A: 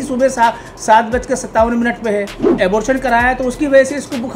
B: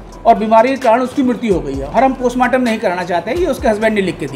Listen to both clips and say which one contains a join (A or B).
A